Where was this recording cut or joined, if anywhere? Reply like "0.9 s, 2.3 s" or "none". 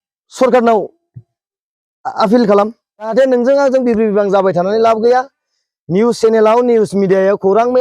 3.1 s